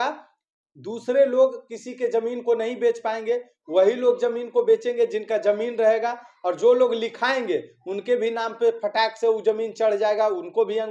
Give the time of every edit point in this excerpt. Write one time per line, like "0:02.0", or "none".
none